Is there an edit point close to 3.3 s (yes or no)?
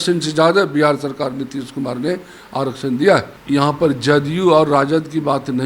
yes